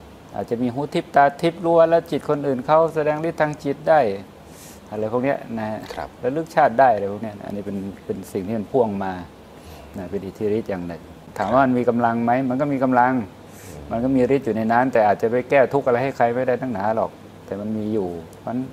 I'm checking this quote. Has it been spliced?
yes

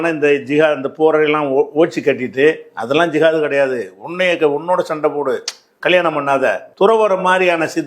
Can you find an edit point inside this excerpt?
yes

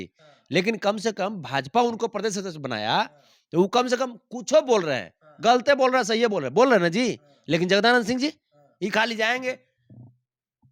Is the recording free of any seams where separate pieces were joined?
yes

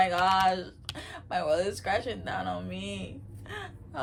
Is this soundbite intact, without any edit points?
yes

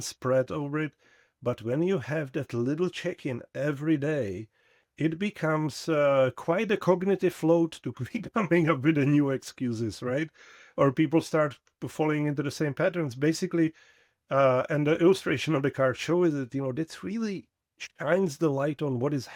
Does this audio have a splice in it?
no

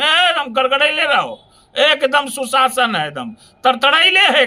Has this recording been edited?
no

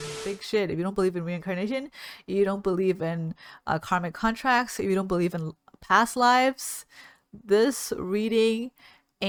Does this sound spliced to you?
no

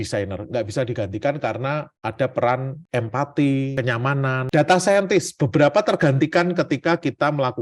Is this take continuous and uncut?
no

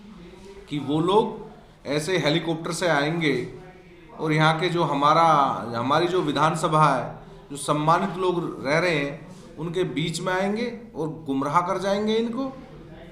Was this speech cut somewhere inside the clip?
no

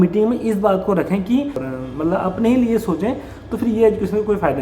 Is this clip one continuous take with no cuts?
no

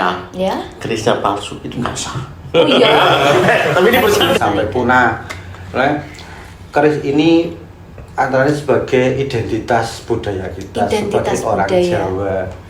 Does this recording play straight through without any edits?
no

